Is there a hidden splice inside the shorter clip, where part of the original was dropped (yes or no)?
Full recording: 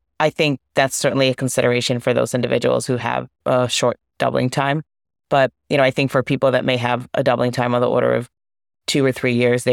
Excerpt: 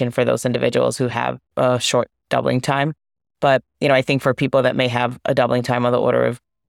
no